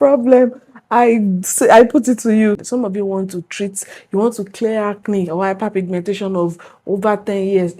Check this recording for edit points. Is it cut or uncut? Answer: cut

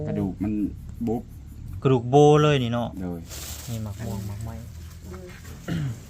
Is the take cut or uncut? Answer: cut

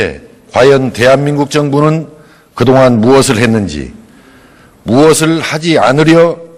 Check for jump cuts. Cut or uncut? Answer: uncut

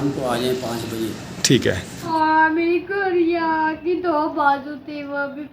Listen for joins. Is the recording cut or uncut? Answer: cut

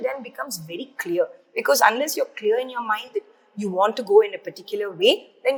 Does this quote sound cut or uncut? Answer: uncut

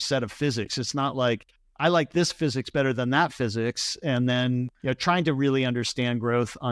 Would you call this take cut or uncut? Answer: cut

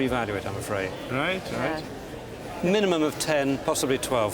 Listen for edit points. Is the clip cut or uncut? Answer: uncut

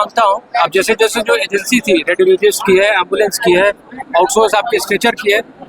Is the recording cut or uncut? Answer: uncut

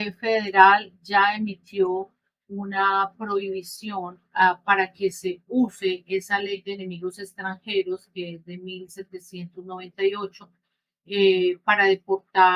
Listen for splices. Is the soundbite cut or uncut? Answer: uncut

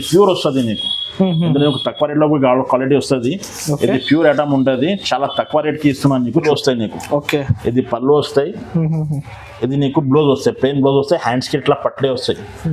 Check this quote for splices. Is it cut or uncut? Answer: cut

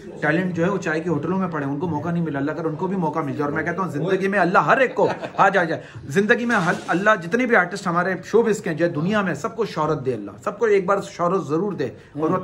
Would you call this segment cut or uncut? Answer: uncut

